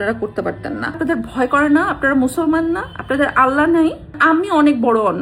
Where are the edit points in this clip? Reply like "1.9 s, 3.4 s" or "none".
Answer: 1.0 s, 4.2 s